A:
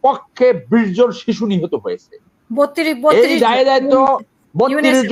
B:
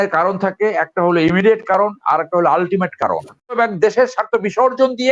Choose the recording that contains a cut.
B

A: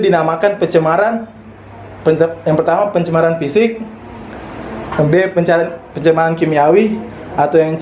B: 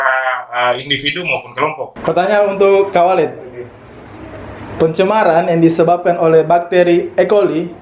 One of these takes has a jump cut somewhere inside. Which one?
B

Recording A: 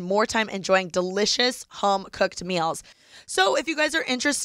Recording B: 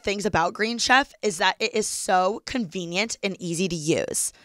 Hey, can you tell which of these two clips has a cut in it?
A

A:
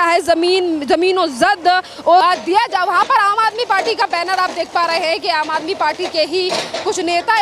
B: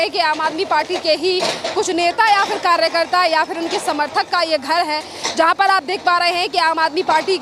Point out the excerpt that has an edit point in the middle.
A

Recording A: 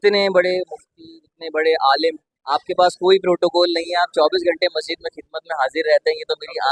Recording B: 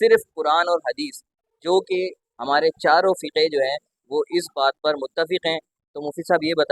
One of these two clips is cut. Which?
B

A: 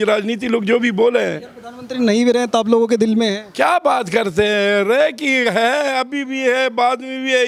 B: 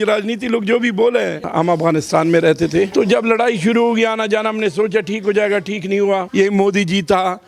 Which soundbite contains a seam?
B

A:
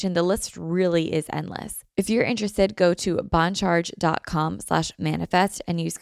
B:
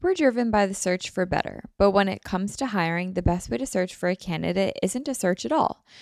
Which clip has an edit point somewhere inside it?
A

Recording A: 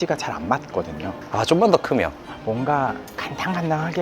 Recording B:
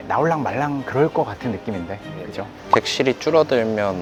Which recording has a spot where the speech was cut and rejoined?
A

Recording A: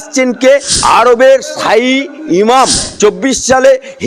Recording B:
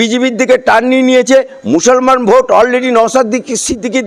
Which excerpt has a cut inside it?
A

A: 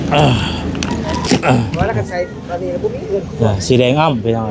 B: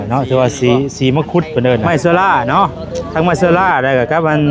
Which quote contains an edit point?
B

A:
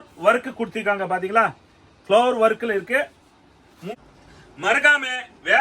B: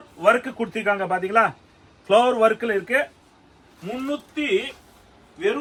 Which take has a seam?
A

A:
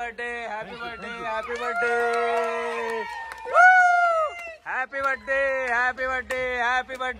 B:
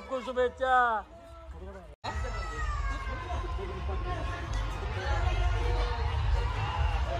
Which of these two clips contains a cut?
B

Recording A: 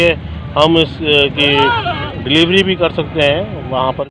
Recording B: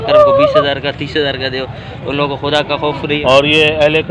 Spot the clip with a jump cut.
B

